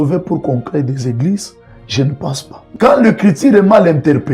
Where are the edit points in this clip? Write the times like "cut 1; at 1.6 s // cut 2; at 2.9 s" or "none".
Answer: cut 1; at 2.5 s